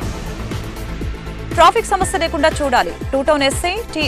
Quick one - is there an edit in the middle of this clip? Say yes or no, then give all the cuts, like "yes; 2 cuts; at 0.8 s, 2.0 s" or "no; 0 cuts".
yes; 1 cut; at 1.5 s